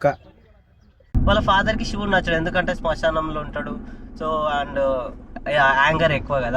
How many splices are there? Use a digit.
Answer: 1